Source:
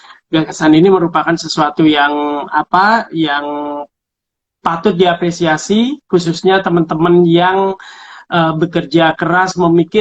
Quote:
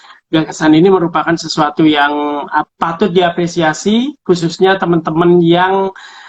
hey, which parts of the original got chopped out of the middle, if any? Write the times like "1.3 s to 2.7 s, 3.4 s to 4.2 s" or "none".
2.7 s to 4.5 s